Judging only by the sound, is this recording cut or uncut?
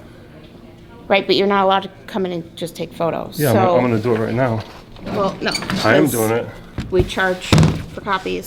uncut